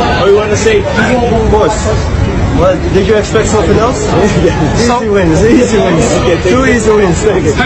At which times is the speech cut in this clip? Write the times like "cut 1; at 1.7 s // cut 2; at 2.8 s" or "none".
none